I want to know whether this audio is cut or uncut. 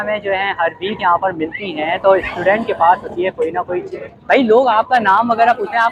uncut